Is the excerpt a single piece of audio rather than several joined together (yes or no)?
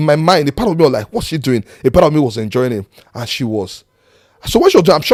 yes